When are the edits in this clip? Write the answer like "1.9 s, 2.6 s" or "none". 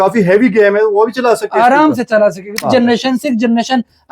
2.6 s